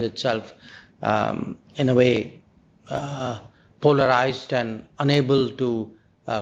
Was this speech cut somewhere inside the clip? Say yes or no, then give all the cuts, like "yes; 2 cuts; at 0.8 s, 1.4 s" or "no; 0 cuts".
no; 0 cuts